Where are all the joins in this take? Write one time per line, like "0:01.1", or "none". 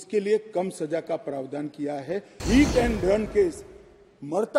0:02.4